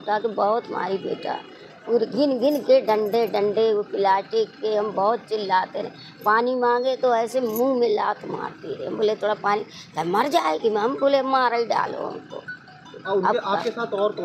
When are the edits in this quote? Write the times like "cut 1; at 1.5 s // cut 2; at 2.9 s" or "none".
none